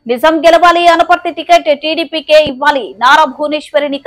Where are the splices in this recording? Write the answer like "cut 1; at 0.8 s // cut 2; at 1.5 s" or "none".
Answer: none